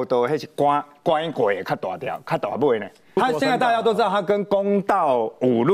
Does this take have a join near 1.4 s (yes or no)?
no